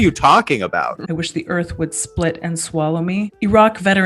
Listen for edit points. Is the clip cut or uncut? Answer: cut